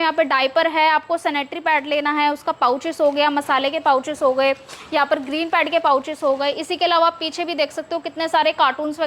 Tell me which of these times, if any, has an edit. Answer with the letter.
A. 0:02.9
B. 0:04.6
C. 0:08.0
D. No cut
D